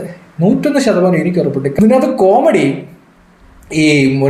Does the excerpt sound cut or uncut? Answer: cut